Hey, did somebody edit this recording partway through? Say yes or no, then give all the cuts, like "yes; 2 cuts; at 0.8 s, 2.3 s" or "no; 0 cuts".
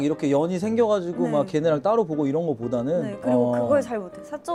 no; 0 cuts